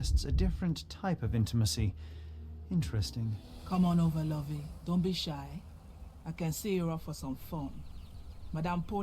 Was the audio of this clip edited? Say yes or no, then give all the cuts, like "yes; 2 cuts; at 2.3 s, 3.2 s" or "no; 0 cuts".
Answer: yes; 2 cuts; at 3.5 s, 4.7 s